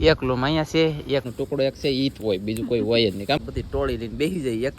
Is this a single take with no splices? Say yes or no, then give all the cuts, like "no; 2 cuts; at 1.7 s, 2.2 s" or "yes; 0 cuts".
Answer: no; 2 cuts; at 1.3 s, 3.4 s